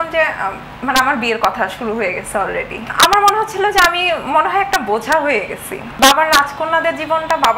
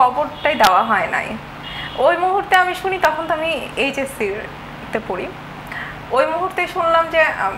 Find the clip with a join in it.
first; 2 cuts; at 2.8 s, 5.9 s

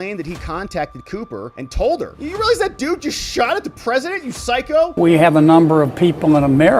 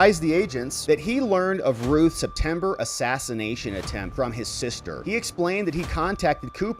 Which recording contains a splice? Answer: first; 1 cut; at 4.9 s

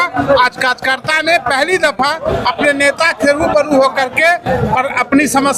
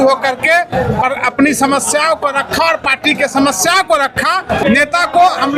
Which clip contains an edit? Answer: second; 1 cut; at 4.6 s

